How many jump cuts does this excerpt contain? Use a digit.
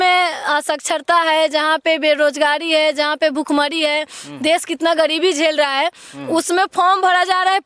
0